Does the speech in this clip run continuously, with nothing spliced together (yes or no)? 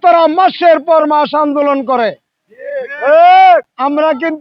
yes